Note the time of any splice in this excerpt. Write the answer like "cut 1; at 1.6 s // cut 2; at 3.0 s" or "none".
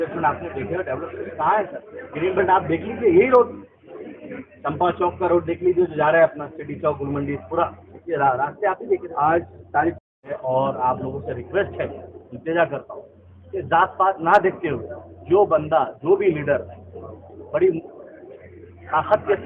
cut 1; at 10.0 s